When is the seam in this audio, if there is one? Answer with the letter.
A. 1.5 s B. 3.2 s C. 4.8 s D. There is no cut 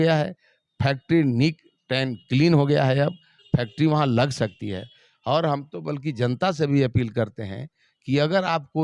D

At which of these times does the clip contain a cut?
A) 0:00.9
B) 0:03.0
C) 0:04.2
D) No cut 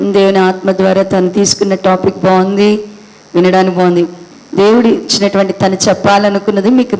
C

